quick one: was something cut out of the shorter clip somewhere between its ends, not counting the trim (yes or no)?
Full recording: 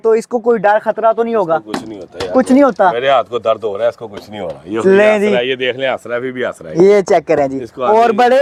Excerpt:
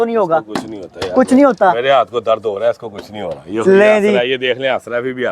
no